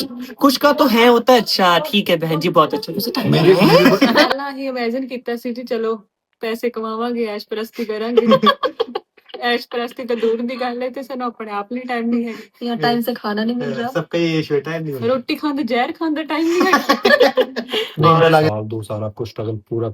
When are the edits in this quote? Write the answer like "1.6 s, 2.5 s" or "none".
4.3 s, 18.5 s